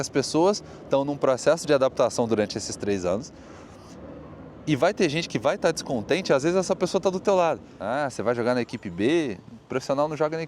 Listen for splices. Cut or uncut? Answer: cut